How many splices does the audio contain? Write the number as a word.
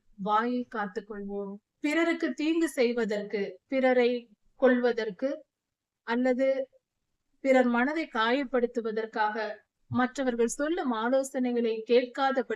one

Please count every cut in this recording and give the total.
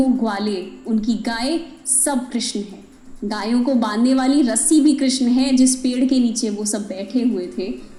zero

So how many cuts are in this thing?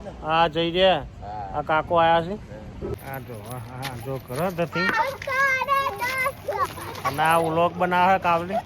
one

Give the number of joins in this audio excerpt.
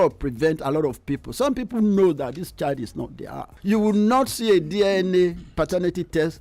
one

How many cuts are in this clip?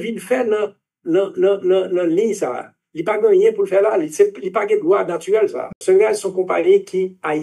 one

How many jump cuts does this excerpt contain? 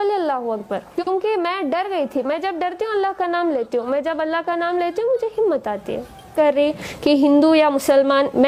one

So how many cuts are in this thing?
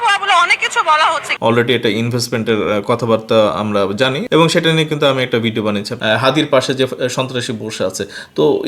two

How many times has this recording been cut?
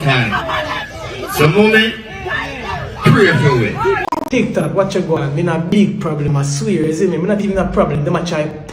one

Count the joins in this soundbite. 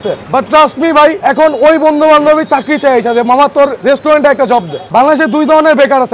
three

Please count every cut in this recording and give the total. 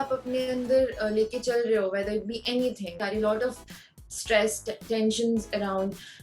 one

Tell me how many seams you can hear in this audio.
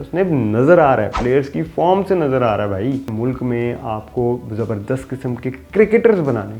one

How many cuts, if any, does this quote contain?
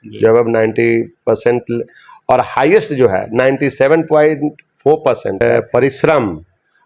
one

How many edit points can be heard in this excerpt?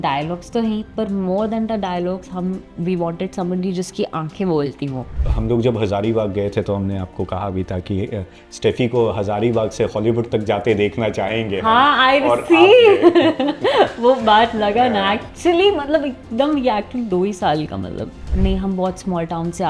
two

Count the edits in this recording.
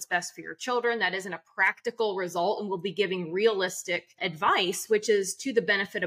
one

